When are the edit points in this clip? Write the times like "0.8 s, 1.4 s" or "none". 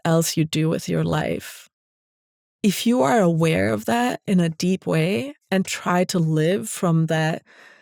none

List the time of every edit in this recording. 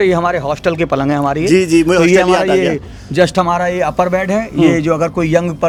none

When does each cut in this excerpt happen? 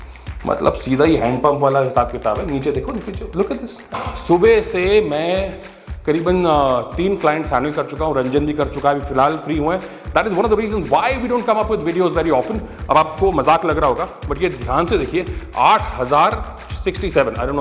3.9 s

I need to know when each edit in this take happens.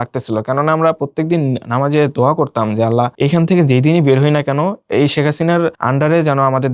3.1 s, 4.8 s, 5.8 s

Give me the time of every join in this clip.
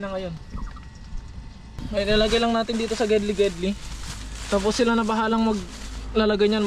1.8 s

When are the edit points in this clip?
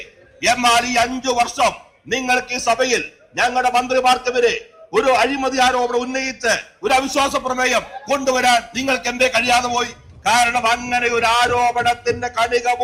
none

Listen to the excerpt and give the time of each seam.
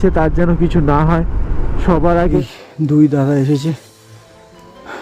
2.4 s

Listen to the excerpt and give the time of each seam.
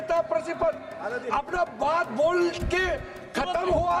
none

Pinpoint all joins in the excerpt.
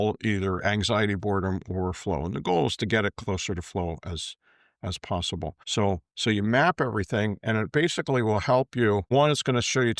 5.6 s, 9.0 s

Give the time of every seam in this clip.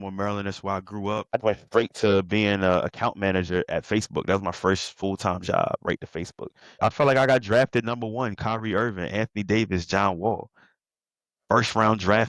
1.4 s, 6.7 s

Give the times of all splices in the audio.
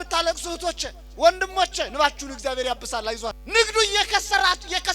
3.4 s

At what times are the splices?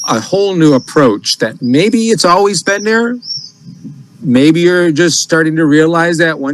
none

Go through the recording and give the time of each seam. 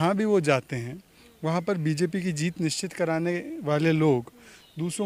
none

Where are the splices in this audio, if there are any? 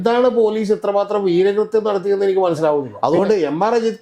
2.9 s

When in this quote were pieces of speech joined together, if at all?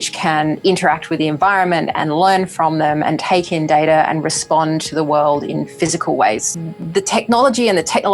6.4 s

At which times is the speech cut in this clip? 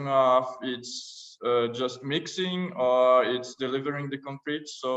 none

